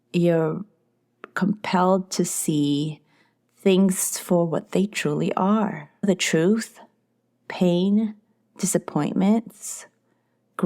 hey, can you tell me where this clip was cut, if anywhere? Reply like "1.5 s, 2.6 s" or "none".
5.9 s